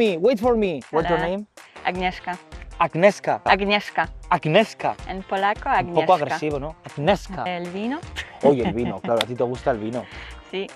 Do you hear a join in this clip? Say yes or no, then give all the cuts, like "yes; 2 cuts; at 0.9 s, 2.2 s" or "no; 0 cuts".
yes; 3 cuts; at 0.8 s, 3.4 s, 7.5 s